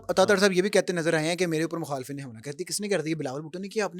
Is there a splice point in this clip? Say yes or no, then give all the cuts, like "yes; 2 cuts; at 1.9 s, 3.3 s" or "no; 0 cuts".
no; 0 cuts